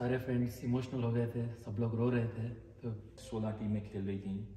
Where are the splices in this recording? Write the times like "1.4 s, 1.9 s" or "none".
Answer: 3.1 s